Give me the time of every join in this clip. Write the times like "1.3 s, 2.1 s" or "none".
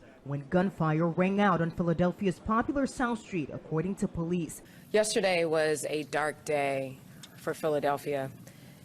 4.8 s